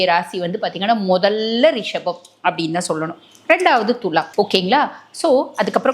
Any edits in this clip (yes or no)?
no